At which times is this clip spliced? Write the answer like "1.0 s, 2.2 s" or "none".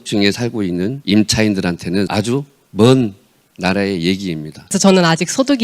1.0 s, 2.1 s, 4.6 s